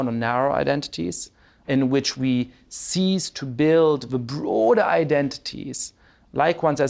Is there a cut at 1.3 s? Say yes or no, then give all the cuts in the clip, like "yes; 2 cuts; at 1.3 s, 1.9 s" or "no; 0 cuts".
yes; 1 cut; at 1.3 s